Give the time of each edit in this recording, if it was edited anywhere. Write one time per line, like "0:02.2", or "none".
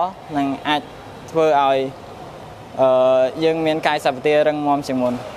none